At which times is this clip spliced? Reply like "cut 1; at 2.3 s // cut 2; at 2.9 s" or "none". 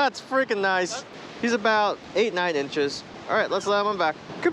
cut 1; at 1.0 s